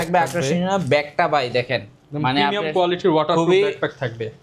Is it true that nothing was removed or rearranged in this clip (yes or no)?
yes